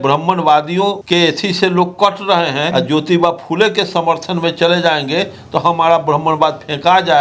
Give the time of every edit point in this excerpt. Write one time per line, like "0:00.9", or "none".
0:01.0
0:02.7